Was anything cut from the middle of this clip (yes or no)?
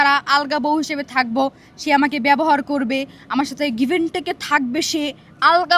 no